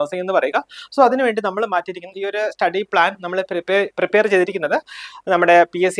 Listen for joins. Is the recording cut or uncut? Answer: cut